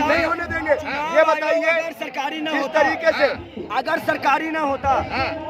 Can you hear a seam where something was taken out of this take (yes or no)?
no